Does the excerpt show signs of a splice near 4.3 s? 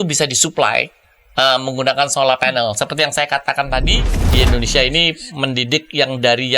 yes; 1 cut; at 4.3 s

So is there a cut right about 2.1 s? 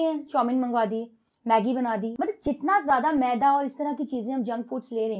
yes; 1 cut; at 2.1 s

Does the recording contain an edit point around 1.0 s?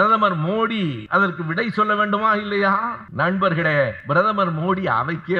yes; 3 cuts; at 1.0 s, 3.0 s, 4.0 s

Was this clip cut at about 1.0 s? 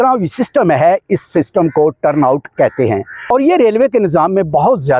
no; 1 cut; at 3.2 s

